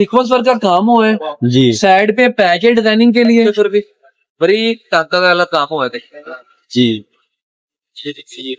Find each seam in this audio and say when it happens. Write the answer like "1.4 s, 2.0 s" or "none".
3.5 s